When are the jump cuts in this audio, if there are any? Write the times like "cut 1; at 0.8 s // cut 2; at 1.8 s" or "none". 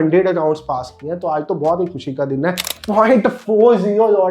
cut 1; at 2.7 s